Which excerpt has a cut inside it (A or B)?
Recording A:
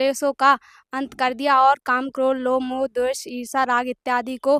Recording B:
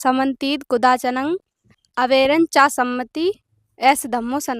B